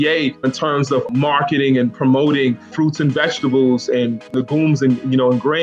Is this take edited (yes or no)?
yes